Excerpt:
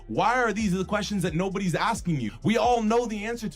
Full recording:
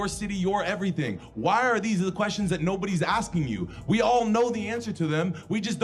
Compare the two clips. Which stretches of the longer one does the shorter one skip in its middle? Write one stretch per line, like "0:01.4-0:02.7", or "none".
0:03.6-0:03.8